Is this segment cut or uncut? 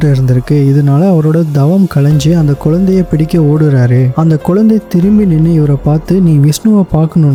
uncut